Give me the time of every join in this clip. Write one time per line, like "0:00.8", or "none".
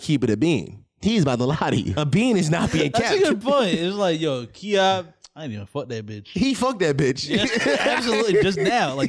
0:01.9